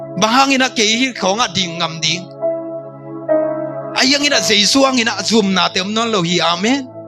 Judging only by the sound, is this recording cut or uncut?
uncut